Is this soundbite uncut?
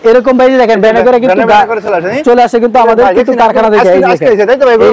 yes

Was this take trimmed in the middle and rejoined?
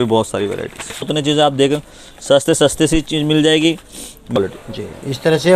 yes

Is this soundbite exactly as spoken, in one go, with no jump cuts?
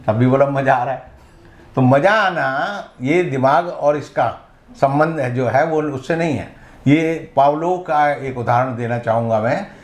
yes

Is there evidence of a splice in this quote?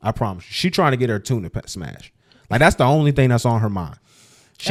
no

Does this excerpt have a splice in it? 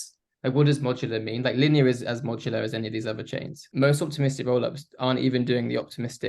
yes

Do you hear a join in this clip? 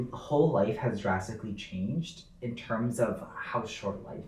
no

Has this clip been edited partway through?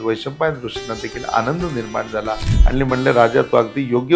yes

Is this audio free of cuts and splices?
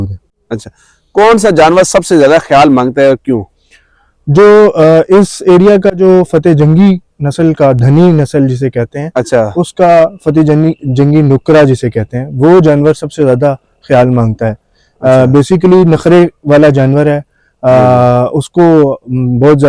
yes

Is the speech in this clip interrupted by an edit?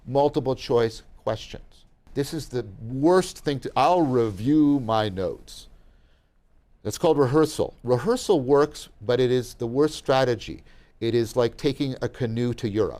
yes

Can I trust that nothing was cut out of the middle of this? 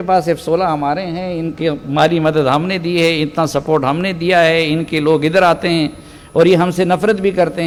yes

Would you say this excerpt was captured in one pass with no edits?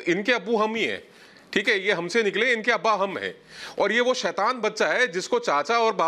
yes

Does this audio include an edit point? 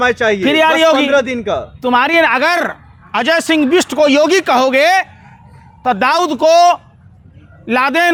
no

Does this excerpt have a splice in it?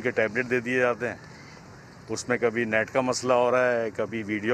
no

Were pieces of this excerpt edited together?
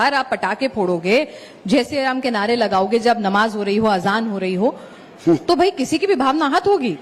no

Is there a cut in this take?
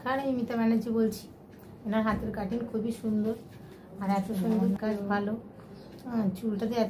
yes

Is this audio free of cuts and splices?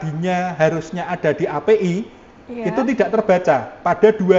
yes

